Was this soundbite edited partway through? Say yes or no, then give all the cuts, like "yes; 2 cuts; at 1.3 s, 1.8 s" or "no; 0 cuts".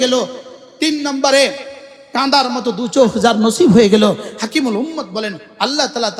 no; 0 cuts